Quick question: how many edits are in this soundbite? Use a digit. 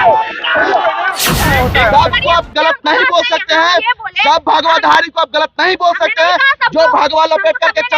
1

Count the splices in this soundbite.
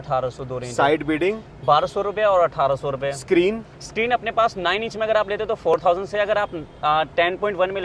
0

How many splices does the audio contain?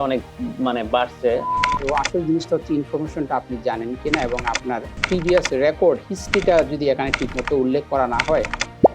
1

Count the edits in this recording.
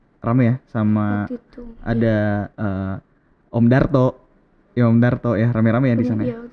1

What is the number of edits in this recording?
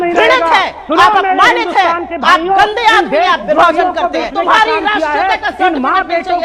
1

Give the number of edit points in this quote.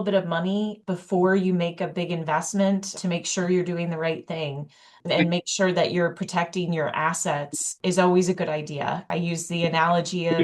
3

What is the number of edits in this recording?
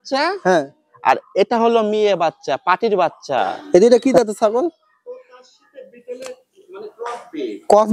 1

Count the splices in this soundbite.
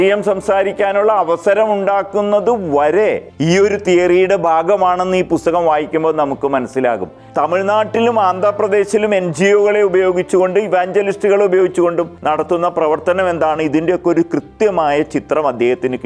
3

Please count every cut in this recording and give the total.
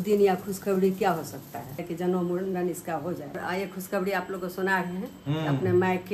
2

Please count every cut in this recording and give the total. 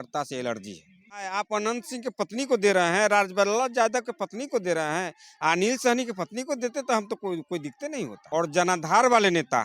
2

